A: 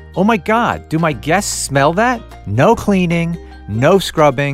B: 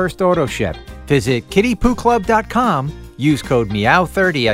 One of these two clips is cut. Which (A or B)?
A